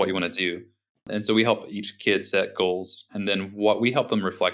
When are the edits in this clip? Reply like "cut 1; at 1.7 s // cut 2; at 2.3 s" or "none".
cut 1; at 1.0 s // cut 2; at 1.9 s // cut 3; at 3.1 s

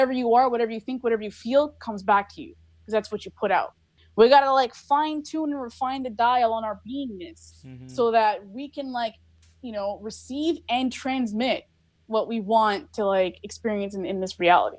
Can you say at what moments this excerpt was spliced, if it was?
cut 1; at 4.0 s

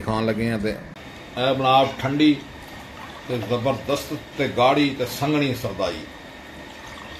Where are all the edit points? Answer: cut 1; at 1.1 s

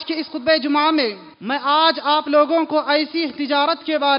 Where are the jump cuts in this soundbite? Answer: cut 1; at 1.3 s

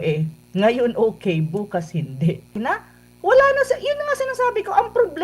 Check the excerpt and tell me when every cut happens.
cut 1; at 2.6 s

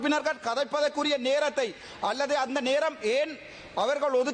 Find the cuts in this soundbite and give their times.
none

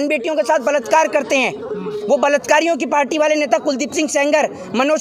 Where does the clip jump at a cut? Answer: none

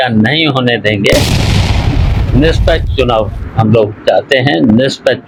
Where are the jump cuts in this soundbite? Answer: none

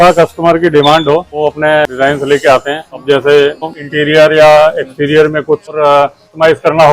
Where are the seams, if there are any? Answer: cut 1; at 3.7 s

